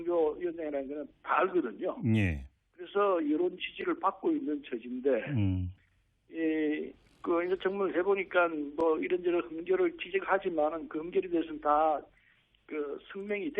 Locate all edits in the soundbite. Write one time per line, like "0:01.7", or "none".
0:10.4